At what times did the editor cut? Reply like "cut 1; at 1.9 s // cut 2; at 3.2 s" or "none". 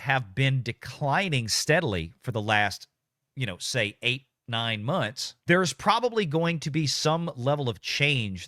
cut 1; at 5.3 s